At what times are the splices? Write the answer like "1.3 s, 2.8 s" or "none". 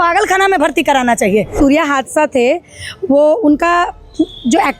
1.6 s